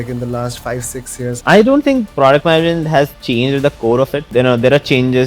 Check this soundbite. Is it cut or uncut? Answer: cut